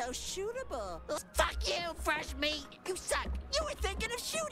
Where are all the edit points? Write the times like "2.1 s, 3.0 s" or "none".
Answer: 1.2 s